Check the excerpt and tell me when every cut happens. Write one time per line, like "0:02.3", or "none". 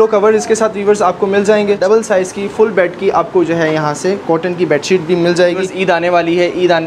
0:01.8
0:05.7